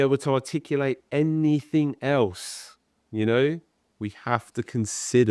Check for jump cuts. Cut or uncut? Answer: uncut